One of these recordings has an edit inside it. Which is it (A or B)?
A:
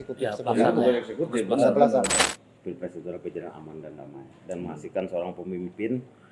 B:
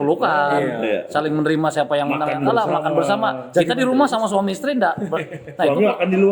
A